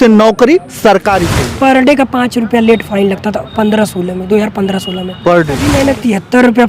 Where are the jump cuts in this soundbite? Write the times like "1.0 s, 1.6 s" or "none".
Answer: 1.4 s, 5.7 s